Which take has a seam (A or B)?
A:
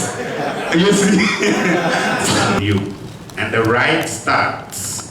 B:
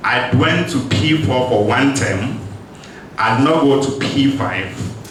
A